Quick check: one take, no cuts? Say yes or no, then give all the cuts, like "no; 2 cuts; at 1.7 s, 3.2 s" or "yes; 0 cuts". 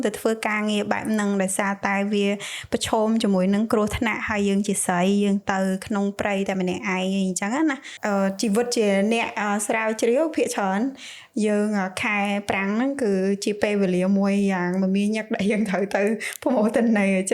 no; 1 cut; at 7.9 s